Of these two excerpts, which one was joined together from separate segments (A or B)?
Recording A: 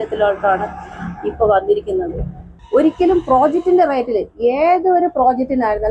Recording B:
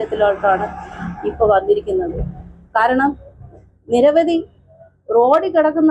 A